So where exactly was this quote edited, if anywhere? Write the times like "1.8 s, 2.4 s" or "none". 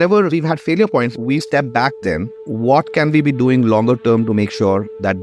2.4 s